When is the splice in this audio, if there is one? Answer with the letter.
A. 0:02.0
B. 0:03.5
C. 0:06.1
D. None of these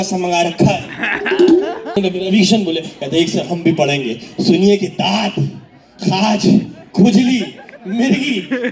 A